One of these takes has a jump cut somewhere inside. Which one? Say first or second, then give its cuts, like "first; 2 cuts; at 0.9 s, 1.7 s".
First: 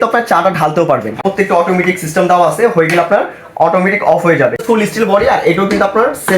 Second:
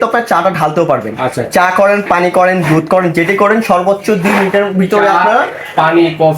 first; 2 cuts; at 1.2 s, 4.6 s